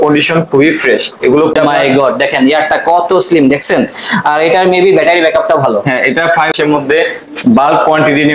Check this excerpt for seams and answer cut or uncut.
cut